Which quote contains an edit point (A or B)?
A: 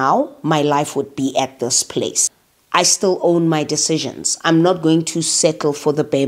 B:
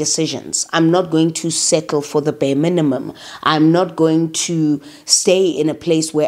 A